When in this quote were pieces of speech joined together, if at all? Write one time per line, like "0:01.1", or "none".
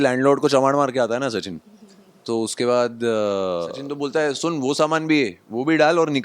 0:03.8